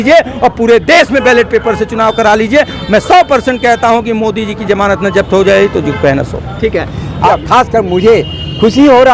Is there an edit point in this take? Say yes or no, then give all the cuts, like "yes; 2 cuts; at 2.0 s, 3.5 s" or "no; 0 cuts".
yes; 1 cut; at 7.3 s